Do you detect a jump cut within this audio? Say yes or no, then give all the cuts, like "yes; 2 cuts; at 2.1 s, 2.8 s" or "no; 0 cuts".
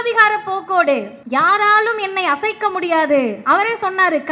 yes; 2 cuts; at 1.2 s, 3.4 s